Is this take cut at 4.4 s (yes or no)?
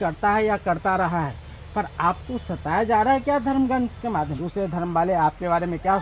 yes